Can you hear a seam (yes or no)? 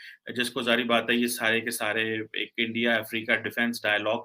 no